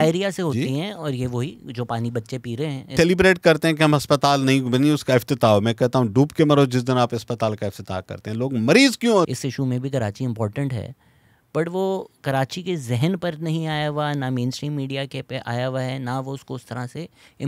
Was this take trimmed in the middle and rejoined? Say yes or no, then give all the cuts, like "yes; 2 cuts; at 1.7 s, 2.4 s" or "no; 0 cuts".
yes; 2 cuts; at 2.9 s, 9.3 s